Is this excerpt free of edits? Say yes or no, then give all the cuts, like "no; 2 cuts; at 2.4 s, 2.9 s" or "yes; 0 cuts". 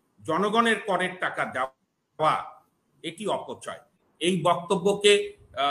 no; 1 cut; at 4.0 s